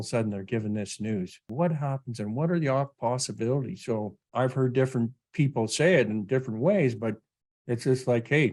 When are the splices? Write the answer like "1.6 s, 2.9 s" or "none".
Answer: 1.5 s, 4.2 s